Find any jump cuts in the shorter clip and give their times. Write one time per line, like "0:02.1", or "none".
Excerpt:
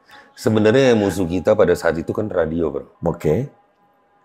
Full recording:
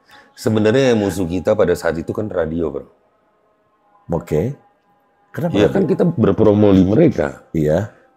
0:02.9